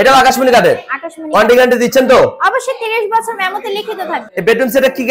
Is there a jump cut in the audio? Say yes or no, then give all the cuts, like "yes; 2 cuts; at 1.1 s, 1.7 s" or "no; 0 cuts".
yes; 1 cut; at 4.2 s